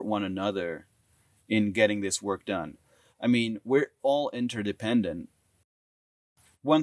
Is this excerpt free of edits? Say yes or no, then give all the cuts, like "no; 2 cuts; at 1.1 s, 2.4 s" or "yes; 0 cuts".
no; 1 cut; at 5.9 s